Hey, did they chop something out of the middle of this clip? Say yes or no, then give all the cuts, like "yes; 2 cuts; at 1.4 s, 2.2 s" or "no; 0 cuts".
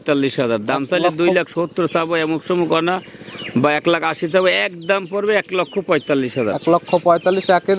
no; 0 cuts